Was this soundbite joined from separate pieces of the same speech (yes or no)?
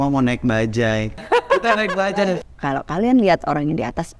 yes